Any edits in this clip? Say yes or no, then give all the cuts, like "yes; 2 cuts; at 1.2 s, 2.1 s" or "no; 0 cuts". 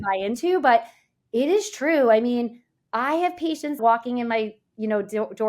yes; 1 cut; at 3.8 s